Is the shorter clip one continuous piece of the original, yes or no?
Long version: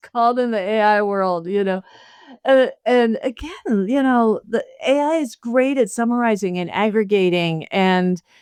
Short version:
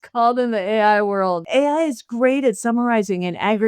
no